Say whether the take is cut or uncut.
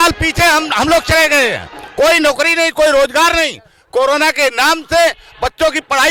uncut